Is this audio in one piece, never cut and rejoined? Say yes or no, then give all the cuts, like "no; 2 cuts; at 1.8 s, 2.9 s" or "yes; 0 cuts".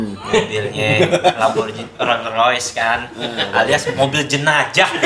yes; 0 cuts